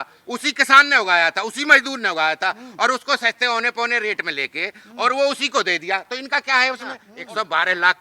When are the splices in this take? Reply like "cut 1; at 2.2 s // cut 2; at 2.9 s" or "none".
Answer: cut 1; at 7.1 s